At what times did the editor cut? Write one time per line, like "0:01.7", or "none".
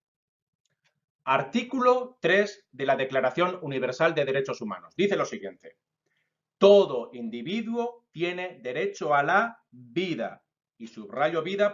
0:09.8